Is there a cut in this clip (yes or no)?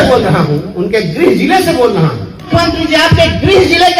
yes